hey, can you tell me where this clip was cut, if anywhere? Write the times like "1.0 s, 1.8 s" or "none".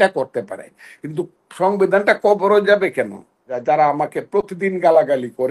3.5 s

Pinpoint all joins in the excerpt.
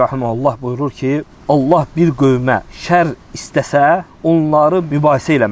1.3 s, 2.7 s, 4.6 s

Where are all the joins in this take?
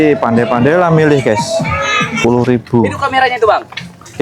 2.1 s

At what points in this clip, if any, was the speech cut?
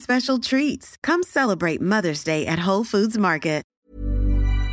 3.7 s

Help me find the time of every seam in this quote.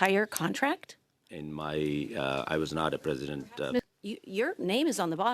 1.3 s, 3.8 s

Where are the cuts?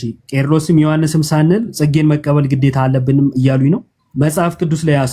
4.0 s

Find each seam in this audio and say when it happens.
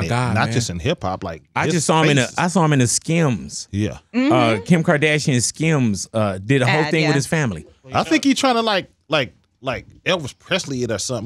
none

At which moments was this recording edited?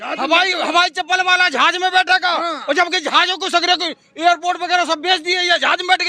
none

